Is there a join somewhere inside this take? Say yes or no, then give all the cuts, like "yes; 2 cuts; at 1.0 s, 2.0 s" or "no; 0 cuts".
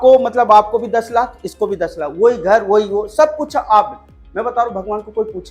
no; 0 cuts